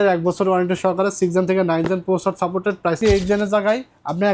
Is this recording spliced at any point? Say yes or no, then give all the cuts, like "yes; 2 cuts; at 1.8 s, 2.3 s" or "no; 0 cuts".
yes; 1 cut; at 3.0 s